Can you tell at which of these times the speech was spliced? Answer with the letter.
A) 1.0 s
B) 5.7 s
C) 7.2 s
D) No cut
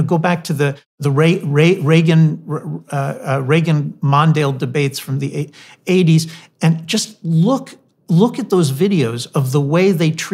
A